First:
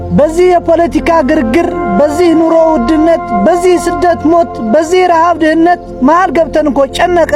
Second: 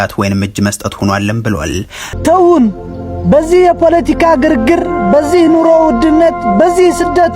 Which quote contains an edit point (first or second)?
second